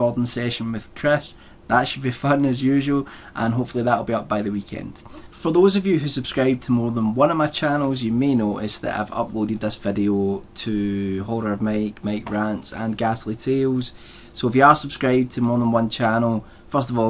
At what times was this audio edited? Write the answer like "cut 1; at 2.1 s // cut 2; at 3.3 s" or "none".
cut 1; at 9.1 s